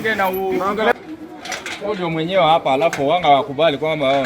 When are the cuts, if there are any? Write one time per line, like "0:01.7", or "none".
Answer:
0:00.9